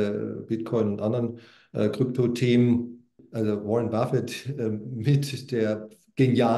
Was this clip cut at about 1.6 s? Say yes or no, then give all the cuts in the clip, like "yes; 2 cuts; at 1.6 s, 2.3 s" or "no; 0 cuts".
no; 1 cut; at 3.2 s